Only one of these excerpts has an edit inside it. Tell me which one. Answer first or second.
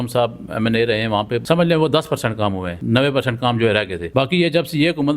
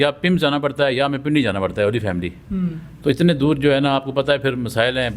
first